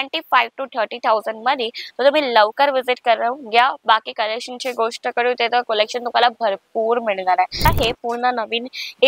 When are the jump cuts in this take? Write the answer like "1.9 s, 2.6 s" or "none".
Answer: 7.7 s